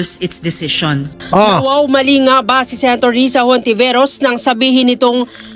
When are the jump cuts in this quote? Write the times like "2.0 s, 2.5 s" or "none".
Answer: none